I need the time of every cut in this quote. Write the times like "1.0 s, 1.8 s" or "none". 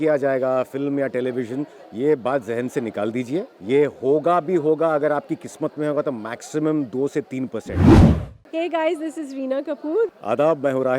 7.6 s, 8.5 s